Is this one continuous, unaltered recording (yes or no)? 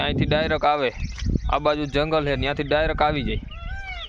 yes